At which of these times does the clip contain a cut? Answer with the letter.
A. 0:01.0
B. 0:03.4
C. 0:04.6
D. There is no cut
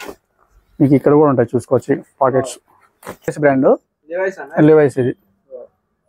B